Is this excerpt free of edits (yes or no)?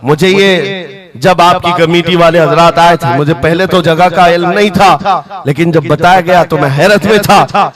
yes